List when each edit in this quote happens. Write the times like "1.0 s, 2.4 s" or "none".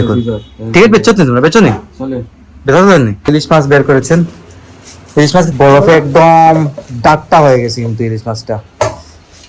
3.3 s, 5.5 s